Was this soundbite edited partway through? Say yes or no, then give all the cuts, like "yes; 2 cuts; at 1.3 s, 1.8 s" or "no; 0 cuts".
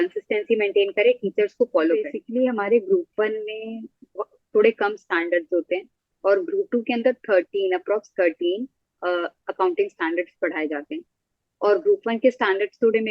yes; 1 cut; at 2.2 s